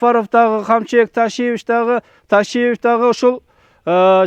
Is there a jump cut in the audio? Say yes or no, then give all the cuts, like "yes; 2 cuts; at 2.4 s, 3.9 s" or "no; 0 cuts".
no; 0 cuts